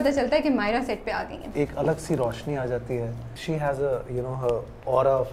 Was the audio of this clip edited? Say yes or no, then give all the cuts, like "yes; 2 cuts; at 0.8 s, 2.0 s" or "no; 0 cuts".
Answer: yes; 2 cuts; at 1.4 s, 3.3 s